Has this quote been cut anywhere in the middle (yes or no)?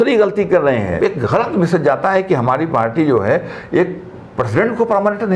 yes